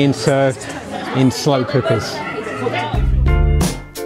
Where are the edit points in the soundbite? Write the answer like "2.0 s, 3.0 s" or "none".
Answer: 2.9 s